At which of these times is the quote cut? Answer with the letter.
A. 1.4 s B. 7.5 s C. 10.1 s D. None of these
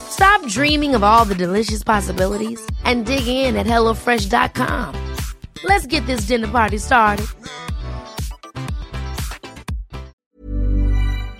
C